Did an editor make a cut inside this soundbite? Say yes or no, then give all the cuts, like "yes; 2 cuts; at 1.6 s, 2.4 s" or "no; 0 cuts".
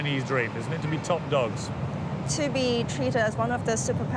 no; 0 cuts